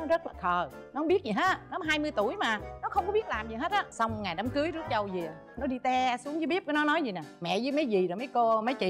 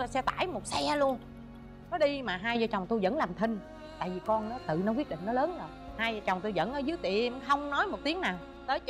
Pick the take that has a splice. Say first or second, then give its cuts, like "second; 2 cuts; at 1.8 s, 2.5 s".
first; 2 cuts; at 2.7 s, 3.9 s